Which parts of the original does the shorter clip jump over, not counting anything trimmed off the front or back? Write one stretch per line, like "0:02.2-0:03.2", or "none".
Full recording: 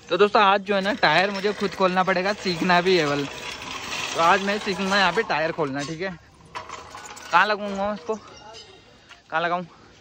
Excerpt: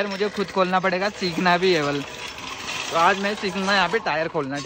none